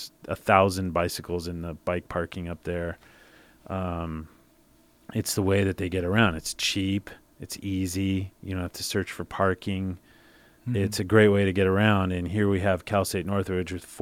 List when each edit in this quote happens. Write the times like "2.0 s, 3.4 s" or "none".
none